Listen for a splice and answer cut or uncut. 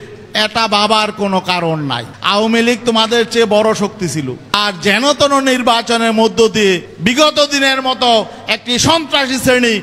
cut